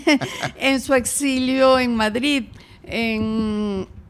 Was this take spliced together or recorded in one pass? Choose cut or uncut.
uncut